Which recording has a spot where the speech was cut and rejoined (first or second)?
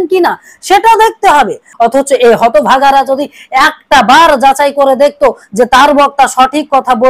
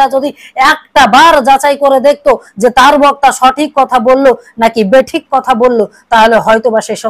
first